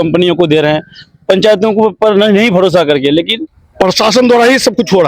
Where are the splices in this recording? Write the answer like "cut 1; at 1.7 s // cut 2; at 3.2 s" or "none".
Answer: cut 1; at 3.6 s